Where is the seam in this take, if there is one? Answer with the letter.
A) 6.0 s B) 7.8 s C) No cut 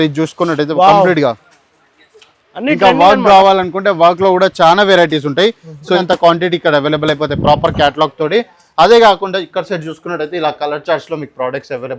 A